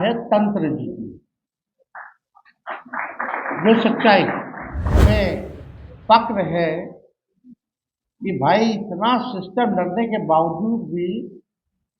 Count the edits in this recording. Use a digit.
1